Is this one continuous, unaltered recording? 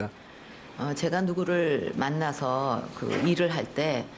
no; 1 cut; at 3.1 s

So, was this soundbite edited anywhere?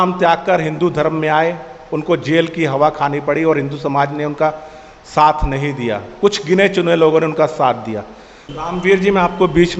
yes; 1 cut; at 8.5 s

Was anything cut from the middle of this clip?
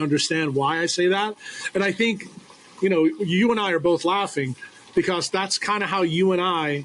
no; 0 cuts

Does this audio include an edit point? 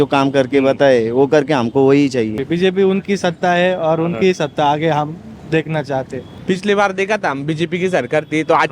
yes; 2 cuts; at 2.4 s, 6.3 s

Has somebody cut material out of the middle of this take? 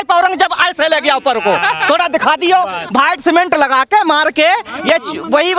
no; 0 cuts

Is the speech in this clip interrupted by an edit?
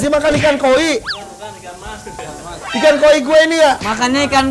no; 0 cuts

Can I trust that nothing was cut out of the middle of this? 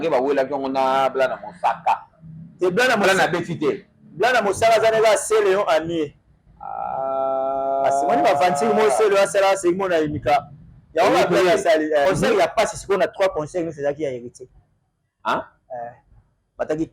no; 1 cut; at 12.0 s

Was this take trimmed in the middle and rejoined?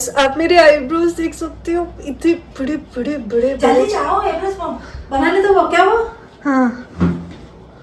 no; 0 cuts

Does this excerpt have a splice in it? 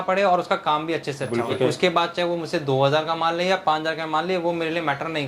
yes; 1 cut; at 1.6 s

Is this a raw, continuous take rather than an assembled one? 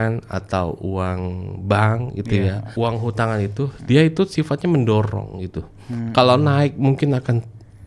no; 1 cut; at 2.7 s

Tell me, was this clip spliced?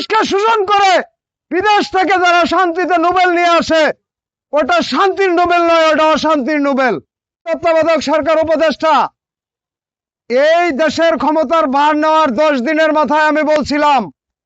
yes; 1 cut; at 7.5 s

